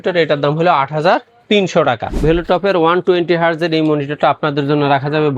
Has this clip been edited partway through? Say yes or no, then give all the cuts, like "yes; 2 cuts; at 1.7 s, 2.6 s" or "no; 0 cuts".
yes; 1 cut; at 2.2 s